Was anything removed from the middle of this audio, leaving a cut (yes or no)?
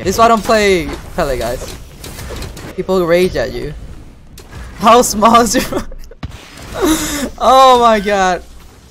yes